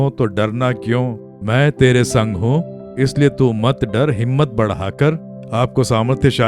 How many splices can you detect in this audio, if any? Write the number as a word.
one